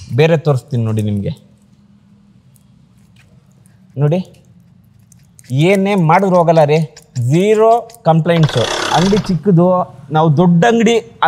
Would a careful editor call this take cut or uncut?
cut